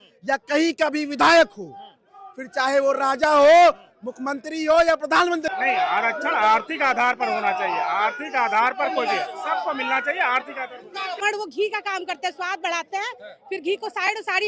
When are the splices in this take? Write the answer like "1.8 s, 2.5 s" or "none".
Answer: 5.5 s, 11.2 s